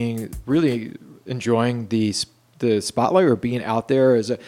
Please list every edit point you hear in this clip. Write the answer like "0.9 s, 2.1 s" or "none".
none